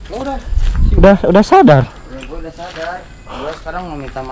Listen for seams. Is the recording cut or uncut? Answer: uncut